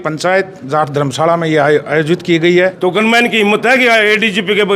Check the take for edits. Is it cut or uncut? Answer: cut